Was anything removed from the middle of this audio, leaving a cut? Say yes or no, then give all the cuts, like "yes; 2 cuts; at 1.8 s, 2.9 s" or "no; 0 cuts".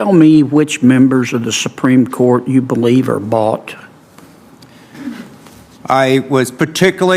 no; 0 cuts